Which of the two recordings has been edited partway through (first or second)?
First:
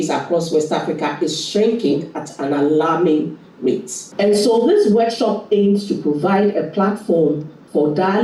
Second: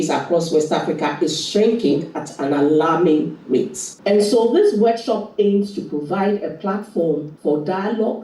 second